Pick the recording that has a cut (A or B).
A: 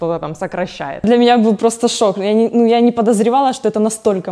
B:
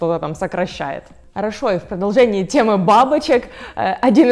A